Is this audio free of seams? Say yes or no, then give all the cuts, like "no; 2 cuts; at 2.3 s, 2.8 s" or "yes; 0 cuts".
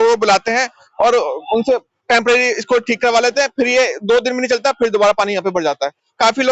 yes; 0 cuts